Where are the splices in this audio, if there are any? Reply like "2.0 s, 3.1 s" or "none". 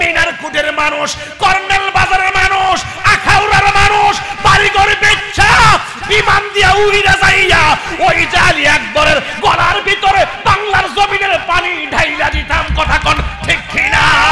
none